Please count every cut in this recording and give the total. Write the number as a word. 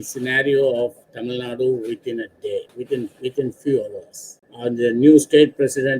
two